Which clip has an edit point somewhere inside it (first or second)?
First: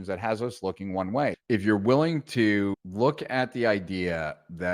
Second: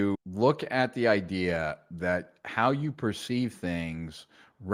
first